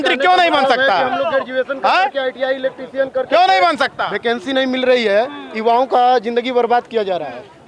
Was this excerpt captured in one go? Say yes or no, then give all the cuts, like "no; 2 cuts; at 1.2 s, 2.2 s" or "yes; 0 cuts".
yes; 0 cuts